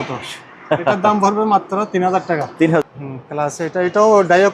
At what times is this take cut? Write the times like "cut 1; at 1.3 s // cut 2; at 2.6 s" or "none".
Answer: cut 1; at 2.8 s